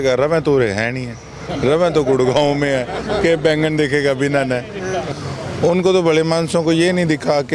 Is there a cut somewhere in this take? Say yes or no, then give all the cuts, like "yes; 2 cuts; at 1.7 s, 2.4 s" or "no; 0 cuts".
yes; 1 cut; at 5.1 s